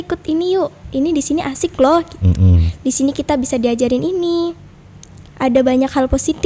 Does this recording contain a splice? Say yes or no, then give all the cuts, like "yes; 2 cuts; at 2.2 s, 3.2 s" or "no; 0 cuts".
no; 0 cuts